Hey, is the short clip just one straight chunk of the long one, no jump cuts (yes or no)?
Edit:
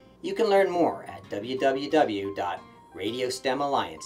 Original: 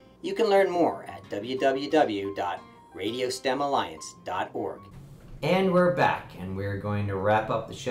yes